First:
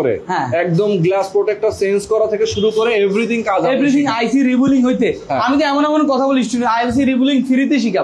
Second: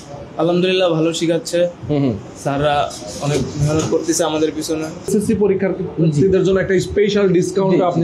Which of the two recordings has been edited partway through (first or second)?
second